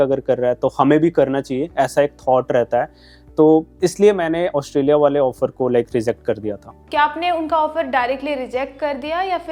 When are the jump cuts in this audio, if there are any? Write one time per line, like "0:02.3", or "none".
none